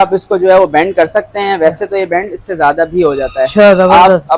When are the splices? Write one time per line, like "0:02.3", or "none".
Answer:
none